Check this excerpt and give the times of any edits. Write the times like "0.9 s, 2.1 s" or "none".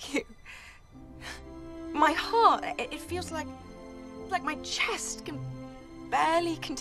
none